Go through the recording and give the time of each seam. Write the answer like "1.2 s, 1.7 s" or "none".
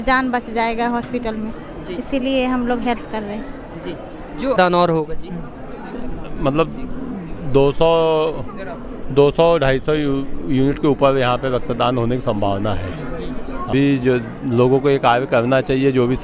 4.6 s, 13.7 s